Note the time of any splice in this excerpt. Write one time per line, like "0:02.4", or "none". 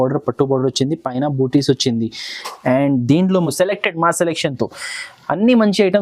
0:03.5